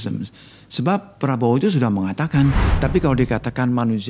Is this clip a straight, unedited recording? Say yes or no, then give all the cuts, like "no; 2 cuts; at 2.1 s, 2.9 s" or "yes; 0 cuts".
no; 1 cut; at 2.7 s